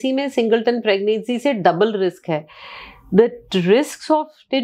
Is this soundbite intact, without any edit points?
yes; 0 cuts

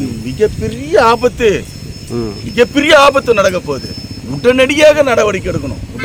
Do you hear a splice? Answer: no; 0 cuts

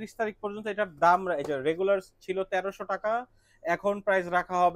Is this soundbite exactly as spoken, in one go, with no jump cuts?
yes; 0 cuts

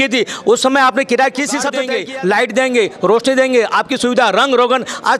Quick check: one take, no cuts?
no; 1 cut; at 1.9 s

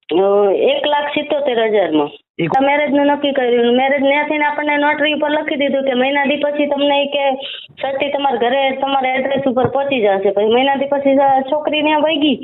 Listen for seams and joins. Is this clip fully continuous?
no; 1 cut; at 2.6 s

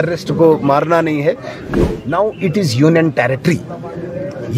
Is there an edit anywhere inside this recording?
yes; 1 cut; at 1.7 s

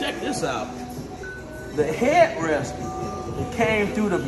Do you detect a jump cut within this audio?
no; 0 cuts

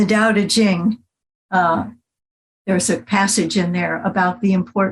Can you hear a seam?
no; 0 cuts

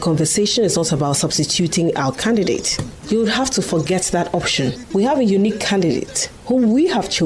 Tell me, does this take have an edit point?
yes; 1 cut; at 4.8 s

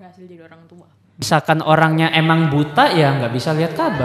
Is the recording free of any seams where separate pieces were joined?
no; 1 cut; at 1.3 s

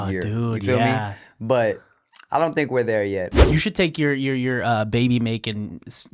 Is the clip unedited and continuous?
no; 1 cut; at 3.3 s

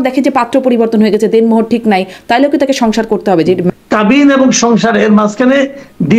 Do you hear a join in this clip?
yes; 1 cut; at 3.7 s

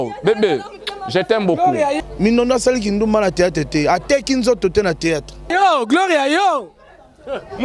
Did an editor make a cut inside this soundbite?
yes; 2 cuts; at 2.0 s, 5.5 s

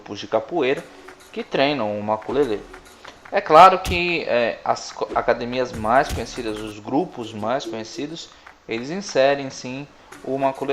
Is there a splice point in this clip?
yes; 1 cut; at 5.5 s

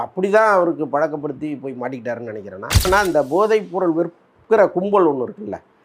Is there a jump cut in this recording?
yes; 1 cut; at 2.9 s

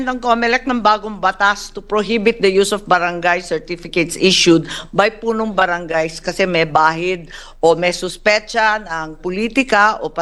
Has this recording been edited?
no; 0 cuts

